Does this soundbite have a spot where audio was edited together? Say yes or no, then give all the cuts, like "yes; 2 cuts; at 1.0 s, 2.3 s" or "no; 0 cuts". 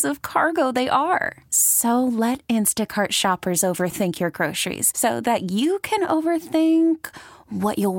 no; 0 cuts